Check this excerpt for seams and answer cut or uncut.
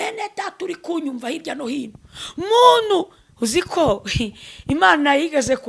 uncut